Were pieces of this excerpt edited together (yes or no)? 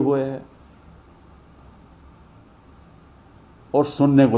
no